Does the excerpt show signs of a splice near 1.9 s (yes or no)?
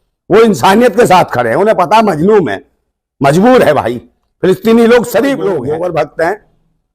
no